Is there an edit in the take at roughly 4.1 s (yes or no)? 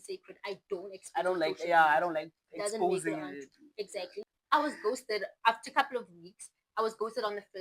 yes